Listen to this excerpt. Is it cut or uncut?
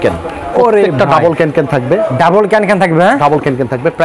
uncut